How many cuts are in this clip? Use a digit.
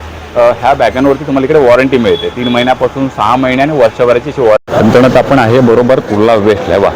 1